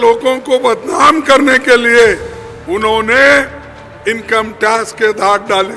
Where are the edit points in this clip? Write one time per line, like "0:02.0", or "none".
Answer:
none